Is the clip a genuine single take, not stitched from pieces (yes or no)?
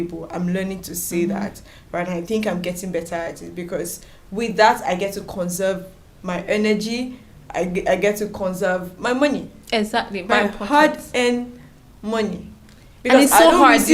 yes